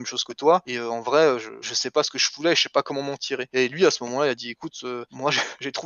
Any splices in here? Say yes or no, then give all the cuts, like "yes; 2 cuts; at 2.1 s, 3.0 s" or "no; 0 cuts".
no; 0 cuts